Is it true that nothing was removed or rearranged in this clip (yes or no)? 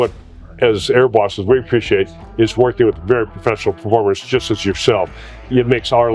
yes